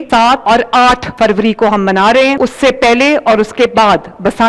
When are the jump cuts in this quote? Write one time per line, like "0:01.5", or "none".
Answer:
none